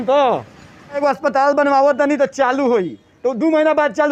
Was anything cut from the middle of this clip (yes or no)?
yes